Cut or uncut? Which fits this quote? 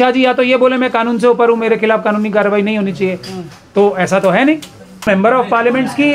cut